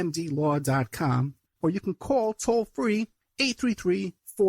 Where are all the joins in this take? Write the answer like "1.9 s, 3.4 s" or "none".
1.5 s